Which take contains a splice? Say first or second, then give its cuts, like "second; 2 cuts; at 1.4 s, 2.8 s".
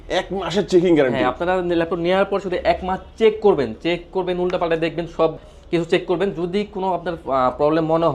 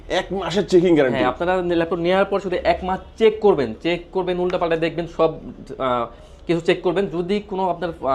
first; 1 cut; at 5.5 s